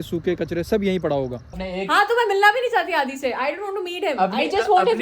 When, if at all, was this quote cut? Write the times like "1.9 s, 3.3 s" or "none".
1.6 s